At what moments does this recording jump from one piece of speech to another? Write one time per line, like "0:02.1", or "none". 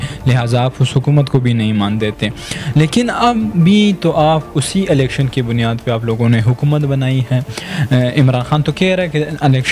none

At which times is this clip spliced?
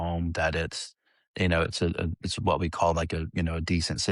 none

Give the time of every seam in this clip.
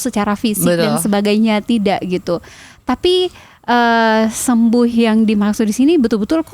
none

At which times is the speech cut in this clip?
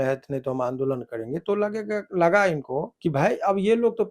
0:02.9

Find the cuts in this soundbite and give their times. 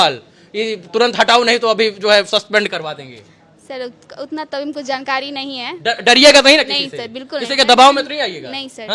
none

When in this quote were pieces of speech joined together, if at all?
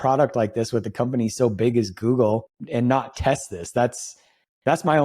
0:02.6

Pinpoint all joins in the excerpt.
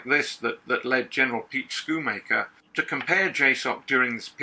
0:02.6

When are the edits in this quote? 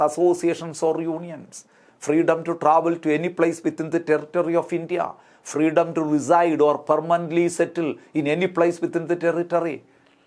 none

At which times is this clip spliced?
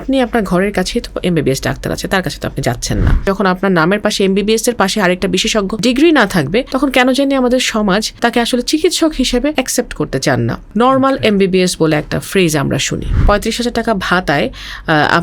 0:03.2
0:05.7
0:06.7
0:08.1
0:09.5
0:10.6
0:13.1

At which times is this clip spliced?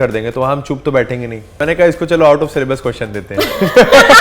0:01.6

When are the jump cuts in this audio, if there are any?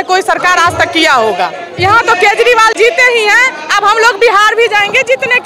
0:01.6

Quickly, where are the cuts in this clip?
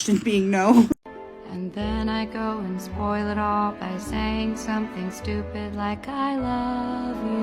0:00.9

